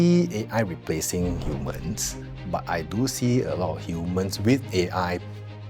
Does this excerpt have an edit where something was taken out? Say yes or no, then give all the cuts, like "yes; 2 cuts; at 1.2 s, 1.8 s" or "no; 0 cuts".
no; 0 cuts